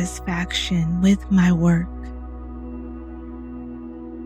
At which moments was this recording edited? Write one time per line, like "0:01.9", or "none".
0:01.9